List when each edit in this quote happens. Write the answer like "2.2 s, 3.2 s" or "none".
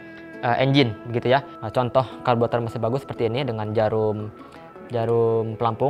1.6 s